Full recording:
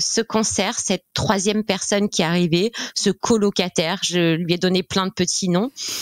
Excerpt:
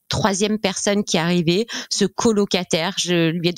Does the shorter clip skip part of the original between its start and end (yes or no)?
no